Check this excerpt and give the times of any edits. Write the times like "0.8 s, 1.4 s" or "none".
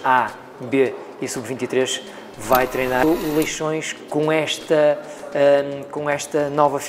3.0 s